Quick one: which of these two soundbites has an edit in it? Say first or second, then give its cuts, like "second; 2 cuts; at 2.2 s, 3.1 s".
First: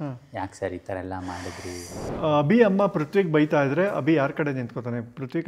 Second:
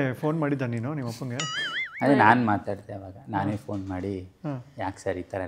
first; 1 cut; at 2.0 s